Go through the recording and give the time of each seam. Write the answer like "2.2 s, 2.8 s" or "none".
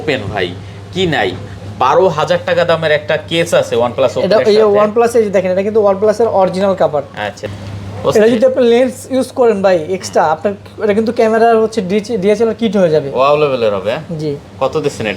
7.4 s